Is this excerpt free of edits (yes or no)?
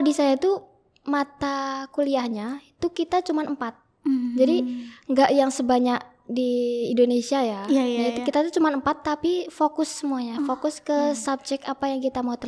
yes